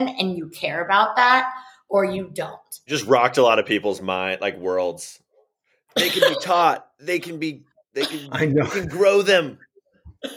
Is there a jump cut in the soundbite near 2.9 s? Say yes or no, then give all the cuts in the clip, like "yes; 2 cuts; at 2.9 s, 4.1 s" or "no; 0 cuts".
yes; 1 cut; at 2.9 s